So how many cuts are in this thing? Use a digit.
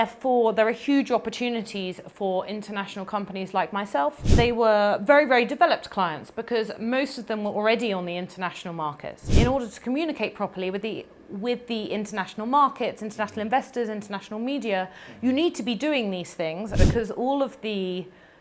3